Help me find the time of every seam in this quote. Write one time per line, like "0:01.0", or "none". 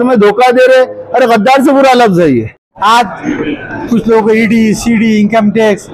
0:02.6